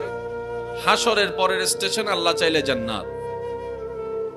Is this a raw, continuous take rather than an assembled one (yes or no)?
no